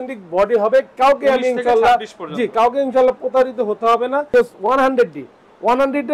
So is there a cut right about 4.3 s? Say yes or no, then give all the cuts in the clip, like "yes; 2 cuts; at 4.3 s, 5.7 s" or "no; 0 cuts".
yes; 1 cut; at 4.3 s